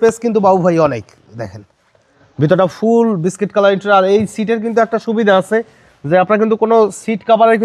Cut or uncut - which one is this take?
uncut